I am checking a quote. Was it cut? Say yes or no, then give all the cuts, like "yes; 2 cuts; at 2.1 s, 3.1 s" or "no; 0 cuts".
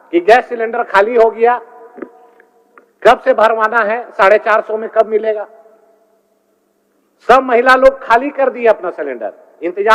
no; 0 cuts